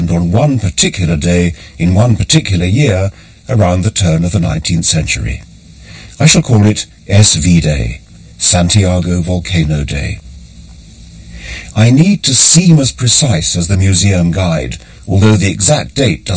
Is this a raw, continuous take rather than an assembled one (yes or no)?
yes